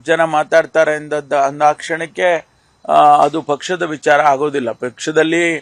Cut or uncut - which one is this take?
uncut